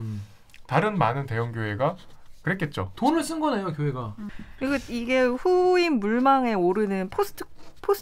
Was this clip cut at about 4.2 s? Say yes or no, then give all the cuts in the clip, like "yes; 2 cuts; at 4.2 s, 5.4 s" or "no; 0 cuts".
yes; 1 cut; at 4.2 s